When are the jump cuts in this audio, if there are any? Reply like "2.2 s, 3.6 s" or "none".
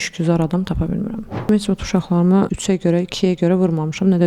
1.4 s, 2.5 s